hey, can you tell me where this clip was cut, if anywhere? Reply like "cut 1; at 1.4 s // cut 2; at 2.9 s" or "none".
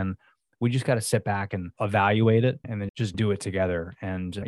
cut 1; at 1.7 s // cut 2; at 2.8 s